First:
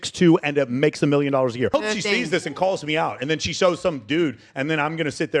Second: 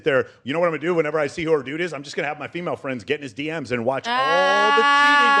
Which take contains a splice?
first; 1 cut; at 1.7 s

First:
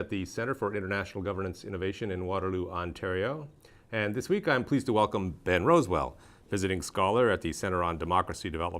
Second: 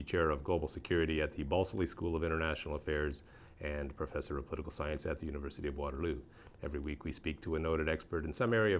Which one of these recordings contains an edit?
first; 1 cut; at 3.2 s

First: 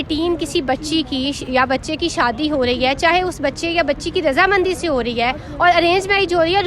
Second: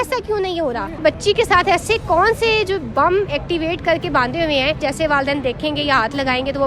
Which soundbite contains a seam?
second; 2 cuts; at 1.0 s, 4.8 s

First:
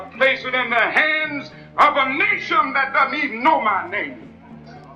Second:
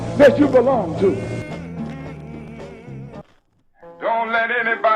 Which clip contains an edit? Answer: second; 1 cut; at 3.2 s

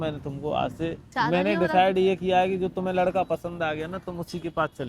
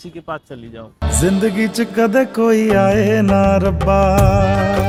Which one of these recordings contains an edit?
first; 1 cut; at 1.0 s

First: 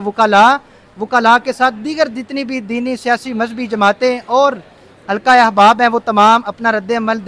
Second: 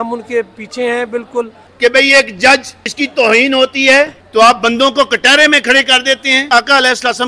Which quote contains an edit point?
second; 4 cuts; at 1.6 s, 2.8 s, 4.2 s, 6.4 s

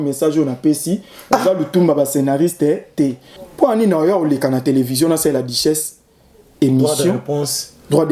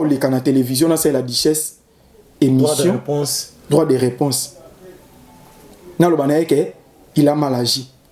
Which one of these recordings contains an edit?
first; 1 cut; at 3.3 s

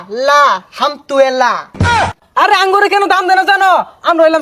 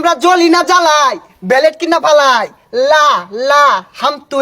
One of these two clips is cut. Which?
first; 1 cut; at 2.2 s

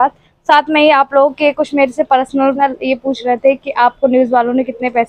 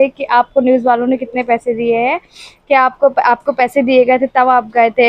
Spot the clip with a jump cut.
first; 1 cut; at 2.6 s

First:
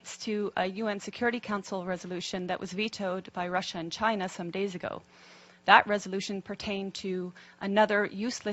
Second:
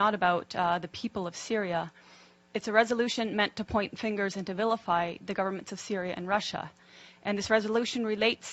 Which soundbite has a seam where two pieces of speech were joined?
first; 1 cut; at 2.9 s

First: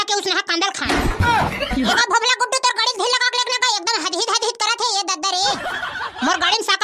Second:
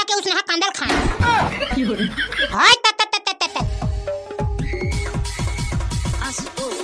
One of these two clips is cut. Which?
first; 1 cut; at 1.9 s

